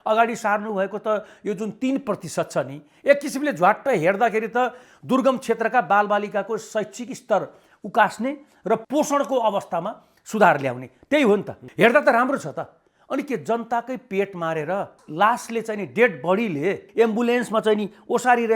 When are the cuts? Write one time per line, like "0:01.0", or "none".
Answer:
0:08.8
0:11.7